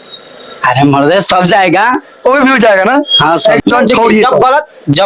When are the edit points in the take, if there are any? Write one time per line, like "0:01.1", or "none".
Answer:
0:03.7